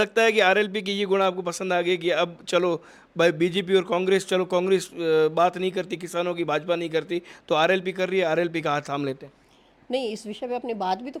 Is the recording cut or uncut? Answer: uncut